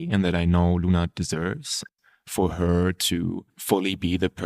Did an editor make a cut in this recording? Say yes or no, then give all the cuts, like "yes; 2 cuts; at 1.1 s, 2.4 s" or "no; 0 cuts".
yes; 2 cuts; at 1.8 s, 3.5 s